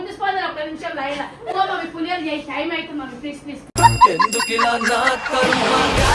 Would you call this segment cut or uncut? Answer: uncut